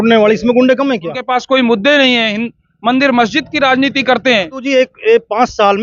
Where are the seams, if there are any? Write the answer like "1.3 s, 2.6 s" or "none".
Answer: 1.2 s, 4.6 s